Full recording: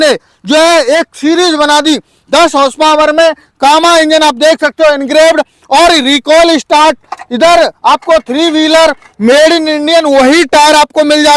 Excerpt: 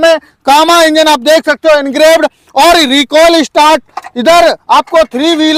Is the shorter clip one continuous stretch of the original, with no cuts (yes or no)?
yes